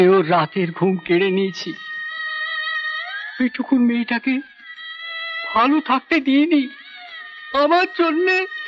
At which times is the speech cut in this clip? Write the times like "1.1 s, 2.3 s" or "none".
none